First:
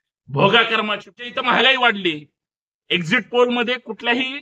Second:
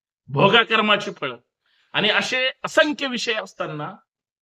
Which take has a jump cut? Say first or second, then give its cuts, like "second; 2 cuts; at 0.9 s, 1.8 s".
first; 1 cut; at 1.4 s